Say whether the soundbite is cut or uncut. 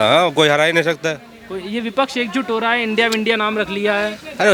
uncut